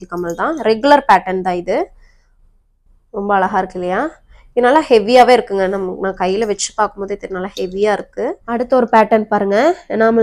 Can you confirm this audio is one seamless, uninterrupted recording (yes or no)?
no